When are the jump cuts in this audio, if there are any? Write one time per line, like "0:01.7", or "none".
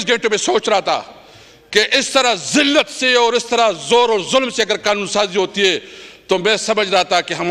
none